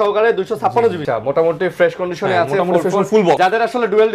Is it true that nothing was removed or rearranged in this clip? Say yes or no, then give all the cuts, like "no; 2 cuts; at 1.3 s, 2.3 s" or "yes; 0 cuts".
no; 2 cuts; at 1.0 s, 3.4 s